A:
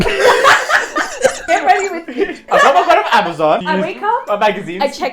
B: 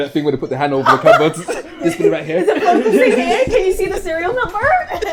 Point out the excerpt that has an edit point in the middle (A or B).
A